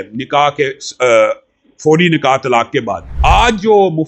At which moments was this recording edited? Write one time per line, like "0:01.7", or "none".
0:03.0